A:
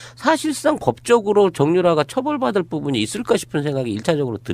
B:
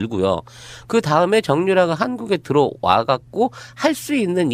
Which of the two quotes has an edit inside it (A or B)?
A